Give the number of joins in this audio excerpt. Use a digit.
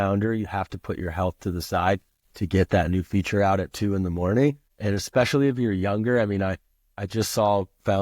1